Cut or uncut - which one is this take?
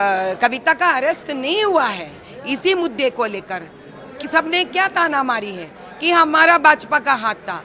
uncut